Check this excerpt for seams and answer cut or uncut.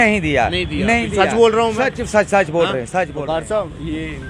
cut